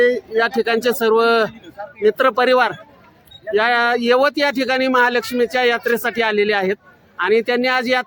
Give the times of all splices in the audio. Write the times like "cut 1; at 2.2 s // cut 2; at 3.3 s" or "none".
none